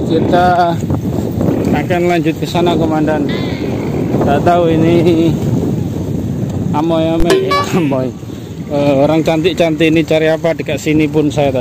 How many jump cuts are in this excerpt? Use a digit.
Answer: 0